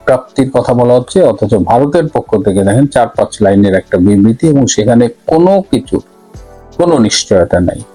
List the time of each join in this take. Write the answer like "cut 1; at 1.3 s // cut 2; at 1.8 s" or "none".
none

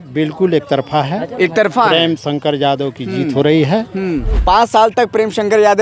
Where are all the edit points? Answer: cut 1; at 4.3 s

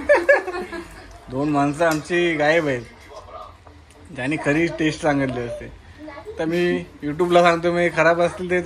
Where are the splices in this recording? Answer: none

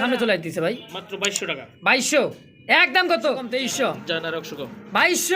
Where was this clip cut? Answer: cut 1; at 3.5 s

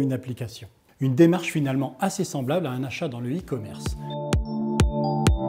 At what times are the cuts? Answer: cut 1; at 3.7 s

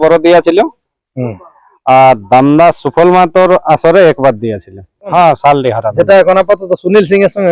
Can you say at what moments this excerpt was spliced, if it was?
cut 1; at 5.1 s

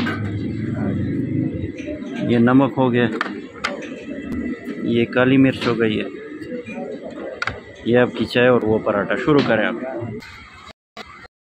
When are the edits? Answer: cut 1; at 10.3 s

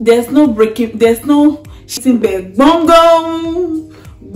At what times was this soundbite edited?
cut 1; at 2.0 s

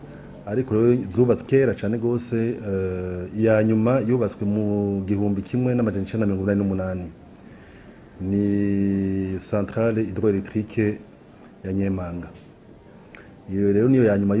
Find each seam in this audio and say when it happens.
cut 1; at 1.4 s

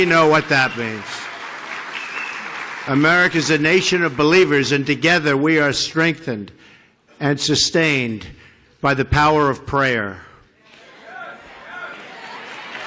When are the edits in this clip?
cut 1; at 3.3 s

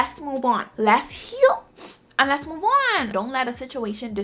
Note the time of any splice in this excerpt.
cut 1; at 3.1 s

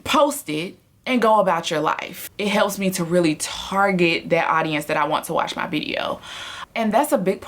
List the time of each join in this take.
cut 1; at 2.2 s // cut 2; at 6.7 s

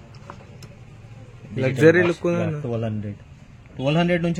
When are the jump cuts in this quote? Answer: none

